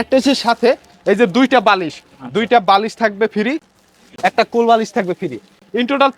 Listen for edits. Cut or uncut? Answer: uncut